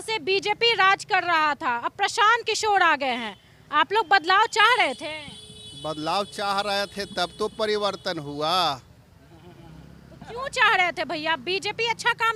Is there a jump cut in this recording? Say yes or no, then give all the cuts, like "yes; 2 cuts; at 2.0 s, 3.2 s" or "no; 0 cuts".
no; 0 cuts